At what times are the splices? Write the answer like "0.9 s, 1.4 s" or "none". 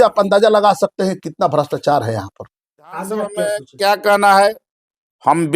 3.4 s